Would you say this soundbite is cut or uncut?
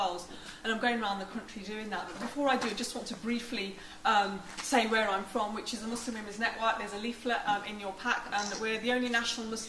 cut